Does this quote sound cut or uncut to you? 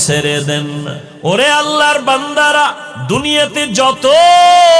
cut